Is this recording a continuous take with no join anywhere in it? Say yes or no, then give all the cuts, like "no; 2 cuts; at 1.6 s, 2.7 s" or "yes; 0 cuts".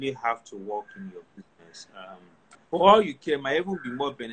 no; 1 cut; at 2.5 s